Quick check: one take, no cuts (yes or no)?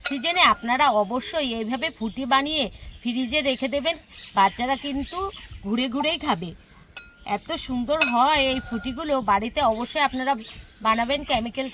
yes